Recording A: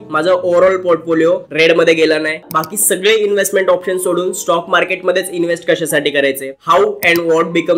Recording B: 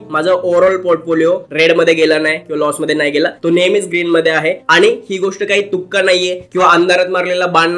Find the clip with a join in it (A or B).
A